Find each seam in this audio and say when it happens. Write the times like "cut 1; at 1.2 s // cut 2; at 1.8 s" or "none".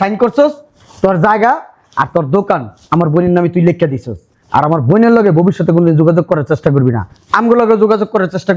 none